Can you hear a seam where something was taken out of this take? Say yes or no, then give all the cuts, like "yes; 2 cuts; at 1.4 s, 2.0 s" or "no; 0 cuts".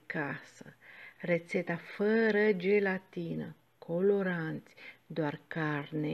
no; 0 cuts